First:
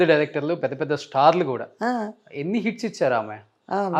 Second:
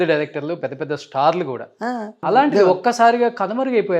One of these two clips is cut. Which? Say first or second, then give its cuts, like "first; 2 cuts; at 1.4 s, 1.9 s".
second; 1 cut; at 2.2 s